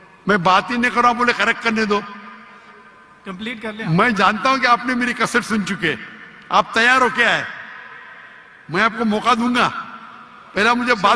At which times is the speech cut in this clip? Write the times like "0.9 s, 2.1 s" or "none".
none